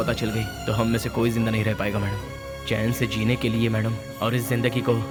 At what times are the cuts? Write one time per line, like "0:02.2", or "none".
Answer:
none